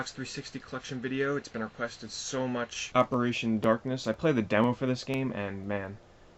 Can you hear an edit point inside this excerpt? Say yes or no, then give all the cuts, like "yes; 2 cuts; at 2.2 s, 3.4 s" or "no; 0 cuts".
yes; 1 cut; at 2.8 s